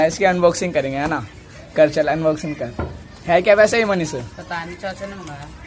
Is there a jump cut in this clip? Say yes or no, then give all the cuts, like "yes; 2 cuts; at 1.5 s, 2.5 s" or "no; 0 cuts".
no; 0 cuts